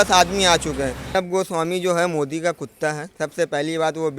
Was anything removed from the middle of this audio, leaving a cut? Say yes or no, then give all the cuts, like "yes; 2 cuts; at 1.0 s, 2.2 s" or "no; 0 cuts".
yes; 2 cuts; at 1.1 s, 3.1 s